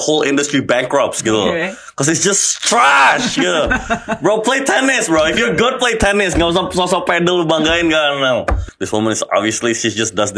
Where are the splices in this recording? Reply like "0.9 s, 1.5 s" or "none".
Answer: 8.6 s